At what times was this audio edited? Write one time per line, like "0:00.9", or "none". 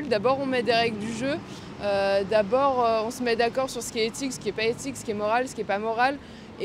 none